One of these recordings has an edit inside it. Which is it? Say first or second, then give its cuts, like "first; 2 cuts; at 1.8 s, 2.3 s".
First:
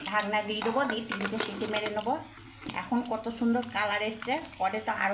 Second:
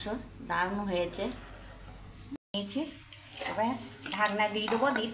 second; 1 cut; at 2.5 s